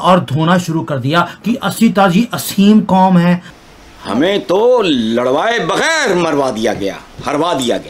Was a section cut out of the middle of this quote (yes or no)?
yes